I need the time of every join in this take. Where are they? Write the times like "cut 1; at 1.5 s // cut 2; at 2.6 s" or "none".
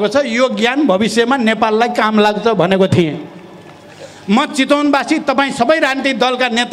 none